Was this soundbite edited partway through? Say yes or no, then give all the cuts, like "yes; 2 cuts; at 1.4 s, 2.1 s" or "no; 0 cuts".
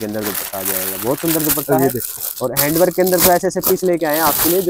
no; 0 cuts